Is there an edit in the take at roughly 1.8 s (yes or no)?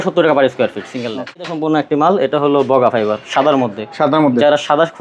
yes